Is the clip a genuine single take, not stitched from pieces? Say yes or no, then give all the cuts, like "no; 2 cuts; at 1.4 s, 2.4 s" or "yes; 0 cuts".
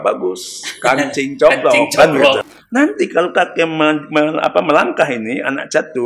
no; 1 cut; at 2.5 s